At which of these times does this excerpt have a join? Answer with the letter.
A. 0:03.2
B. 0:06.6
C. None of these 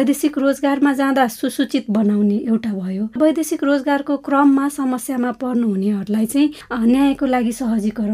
A